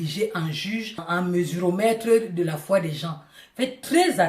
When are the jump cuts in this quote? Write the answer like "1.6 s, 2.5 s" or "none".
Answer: 1.0 s